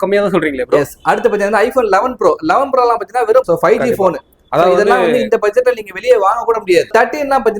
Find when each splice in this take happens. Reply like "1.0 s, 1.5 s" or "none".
3.5 s, 6.9 s